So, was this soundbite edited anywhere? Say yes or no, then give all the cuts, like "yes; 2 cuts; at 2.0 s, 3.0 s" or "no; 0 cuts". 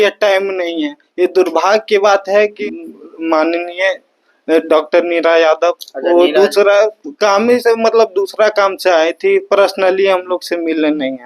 yes; 1 cut; at 2.6 s